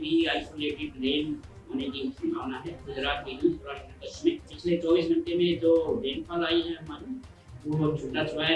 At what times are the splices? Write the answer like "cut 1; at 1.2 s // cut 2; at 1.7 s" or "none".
cut 1; at 4.5 s